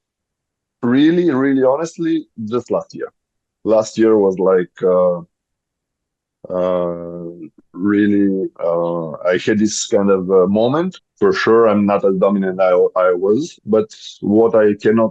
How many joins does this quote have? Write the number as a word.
one